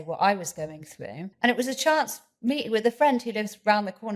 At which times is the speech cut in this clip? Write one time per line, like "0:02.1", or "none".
0:01.2